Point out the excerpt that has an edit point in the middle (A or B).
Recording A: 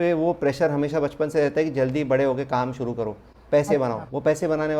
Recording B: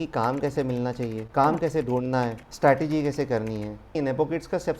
B